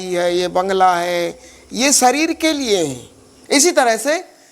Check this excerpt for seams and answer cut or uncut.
cut